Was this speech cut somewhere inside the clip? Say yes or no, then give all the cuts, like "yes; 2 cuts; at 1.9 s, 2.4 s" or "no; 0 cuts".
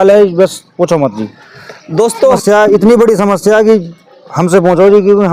yes; 1 cut; at 2.4 s